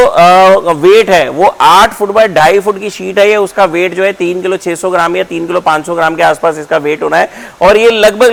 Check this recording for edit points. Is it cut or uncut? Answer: uncut